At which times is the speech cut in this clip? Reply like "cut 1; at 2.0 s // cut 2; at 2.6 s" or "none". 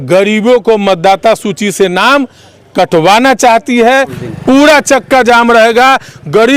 cut 1; at 4.1 s